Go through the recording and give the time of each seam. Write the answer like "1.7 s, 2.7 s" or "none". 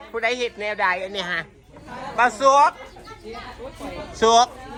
none